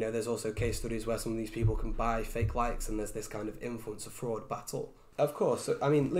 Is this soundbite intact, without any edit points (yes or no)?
no